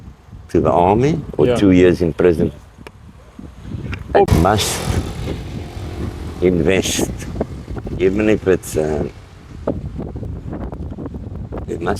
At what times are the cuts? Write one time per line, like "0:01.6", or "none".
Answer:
0:04.3